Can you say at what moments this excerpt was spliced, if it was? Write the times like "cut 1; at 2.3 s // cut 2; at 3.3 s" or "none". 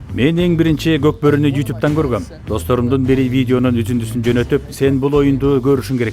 none